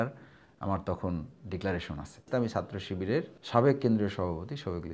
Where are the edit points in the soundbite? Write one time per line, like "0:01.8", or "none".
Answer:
0:02.3
0:03.4